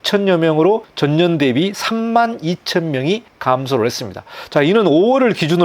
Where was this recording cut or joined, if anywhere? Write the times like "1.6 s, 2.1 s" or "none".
0.9 s, 3.3 s

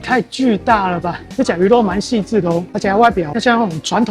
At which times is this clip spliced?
1.2 s

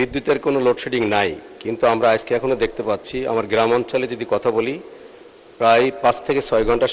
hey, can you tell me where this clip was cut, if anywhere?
none

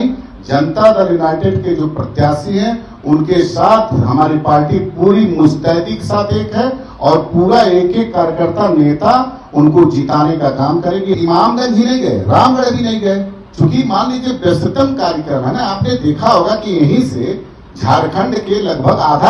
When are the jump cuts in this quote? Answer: 11.2 s

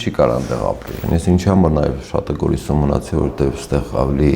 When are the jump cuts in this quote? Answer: 1.0 s

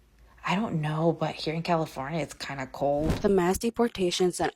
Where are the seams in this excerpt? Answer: 3.2 s

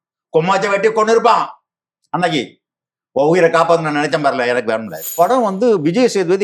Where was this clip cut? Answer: 5.0 s

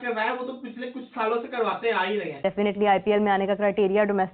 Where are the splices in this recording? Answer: 2.4 s

